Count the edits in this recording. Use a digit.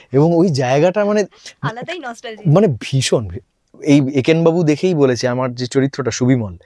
1